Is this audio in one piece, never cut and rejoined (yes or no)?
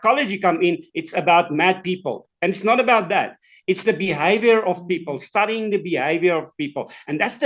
yes